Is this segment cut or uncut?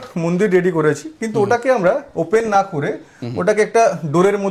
uncut